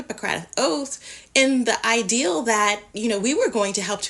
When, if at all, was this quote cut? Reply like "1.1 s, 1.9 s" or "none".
none